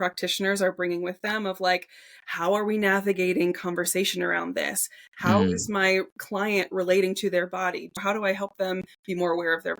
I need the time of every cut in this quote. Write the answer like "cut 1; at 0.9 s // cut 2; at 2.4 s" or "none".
cut 1; at 8.0 s

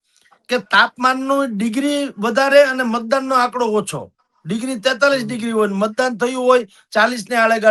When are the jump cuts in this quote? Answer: none

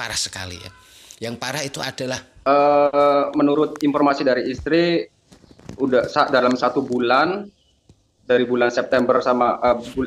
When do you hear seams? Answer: cut 1; at 2.3 s

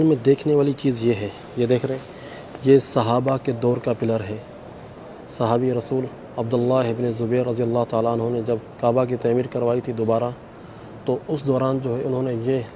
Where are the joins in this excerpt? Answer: cut 1; at 1.4 s

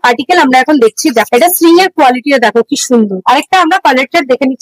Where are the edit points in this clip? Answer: cut 1; at 1.3 s // cut 2; at 3.2 s

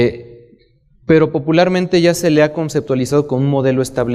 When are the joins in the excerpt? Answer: cut 1; at 3.2 s

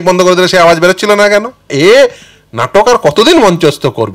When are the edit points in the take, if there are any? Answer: cut 1; at 1.7 s

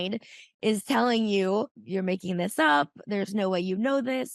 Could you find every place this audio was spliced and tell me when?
cut 1; at 1.8 s

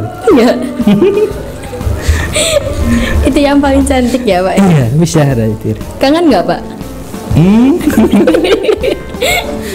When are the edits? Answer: none

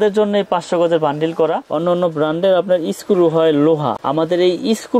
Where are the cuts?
cut 1; at 1.6 s

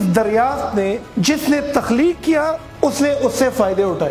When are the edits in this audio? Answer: cut 1; at 1.0 s

